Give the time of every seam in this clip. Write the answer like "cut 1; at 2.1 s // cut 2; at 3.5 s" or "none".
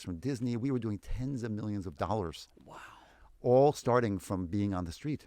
none